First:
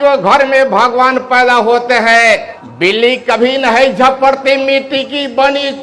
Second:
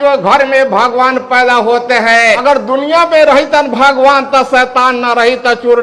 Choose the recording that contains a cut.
second; 1 cut; at 2.4 s

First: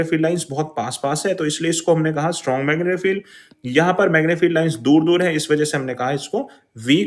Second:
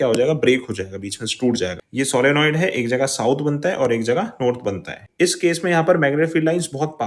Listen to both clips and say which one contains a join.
second; 2 cuts; at 1.8 s, 5.0 s

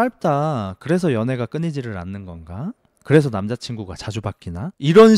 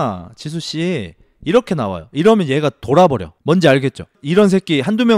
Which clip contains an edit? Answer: second; 2 cuts; at 3.3 s, 4.2 s

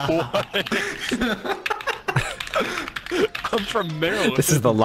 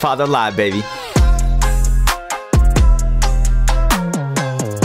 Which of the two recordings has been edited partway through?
second; 1 cut; at 1.0 s

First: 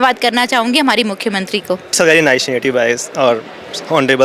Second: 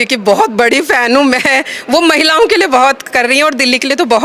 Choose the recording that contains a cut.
first; 1 cut; at 1.9 s

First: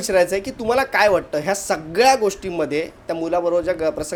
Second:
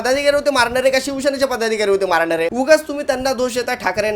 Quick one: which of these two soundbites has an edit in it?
second; 1 cut; at 2.5 s

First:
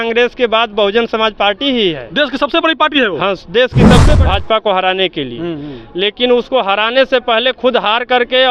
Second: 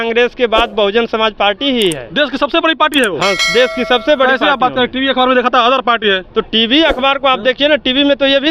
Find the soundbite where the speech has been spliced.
first; 1 cut; at 4.1 s

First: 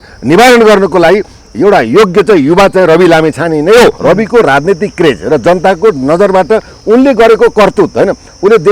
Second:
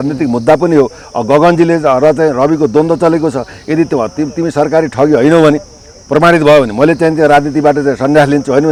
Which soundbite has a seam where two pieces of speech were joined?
first; 1 cut; at 4.0 s

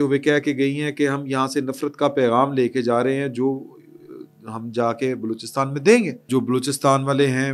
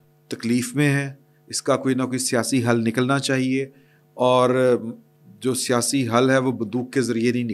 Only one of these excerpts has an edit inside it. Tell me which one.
first; 1 cut; at 6.3 s

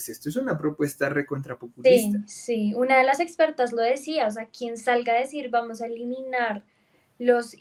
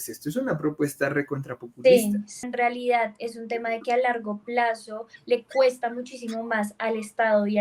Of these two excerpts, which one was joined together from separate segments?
second; 1 cut; at 2.5 s

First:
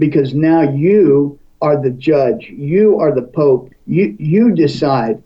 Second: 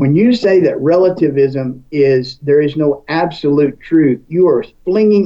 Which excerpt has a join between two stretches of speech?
first; 1 cut; at 3.7 s

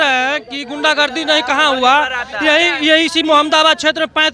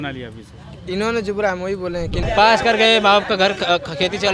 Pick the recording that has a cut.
second; 1 cut; at 2.2 s

